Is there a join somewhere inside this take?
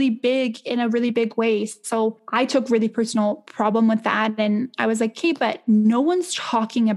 yes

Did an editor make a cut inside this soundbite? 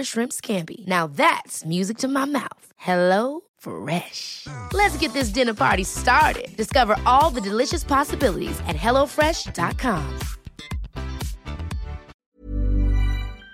yes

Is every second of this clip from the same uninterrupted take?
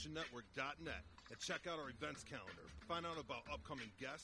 yes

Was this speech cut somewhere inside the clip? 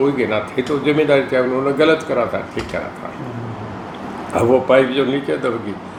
no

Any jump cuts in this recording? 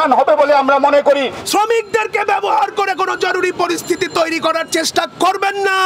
yes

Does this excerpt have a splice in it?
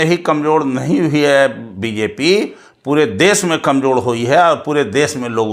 no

